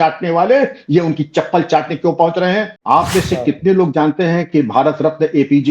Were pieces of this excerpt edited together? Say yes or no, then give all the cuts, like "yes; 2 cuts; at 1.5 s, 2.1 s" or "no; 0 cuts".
yes; 1 cut; at 2.7 s